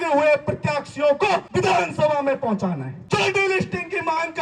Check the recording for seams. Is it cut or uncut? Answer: cut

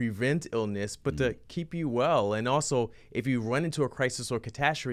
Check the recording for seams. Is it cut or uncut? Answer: uncut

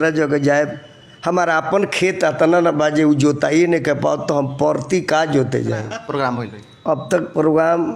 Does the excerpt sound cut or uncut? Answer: cut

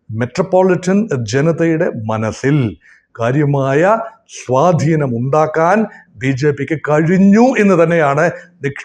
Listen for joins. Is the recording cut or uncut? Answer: uncut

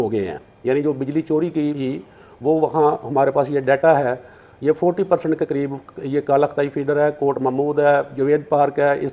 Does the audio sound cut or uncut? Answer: cut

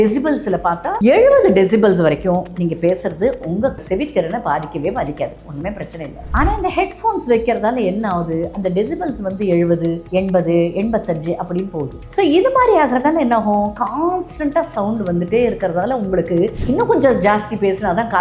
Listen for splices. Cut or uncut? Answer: cut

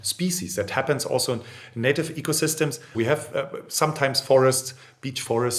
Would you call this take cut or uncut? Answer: cut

